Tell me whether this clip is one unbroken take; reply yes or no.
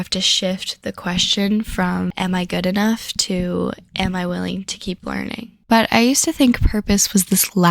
no